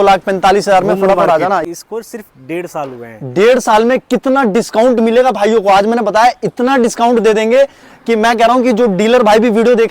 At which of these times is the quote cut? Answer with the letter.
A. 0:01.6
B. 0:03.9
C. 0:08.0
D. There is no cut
A